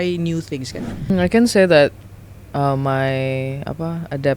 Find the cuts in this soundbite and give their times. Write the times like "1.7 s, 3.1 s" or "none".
1.1 s